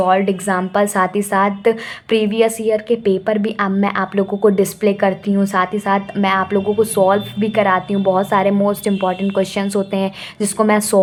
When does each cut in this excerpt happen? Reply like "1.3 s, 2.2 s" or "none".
none